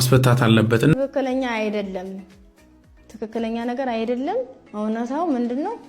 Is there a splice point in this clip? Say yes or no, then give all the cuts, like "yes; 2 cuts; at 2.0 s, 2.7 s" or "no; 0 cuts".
yes; 1 cut; at 0.9 s